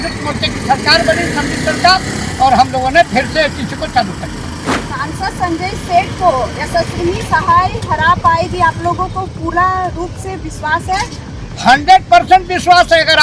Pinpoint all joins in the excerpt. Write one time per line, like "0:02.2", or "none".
none